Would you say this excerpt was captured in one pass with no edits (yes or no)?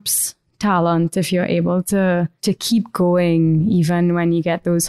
no